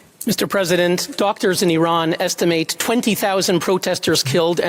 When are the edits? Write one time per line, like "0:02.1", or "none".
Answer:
none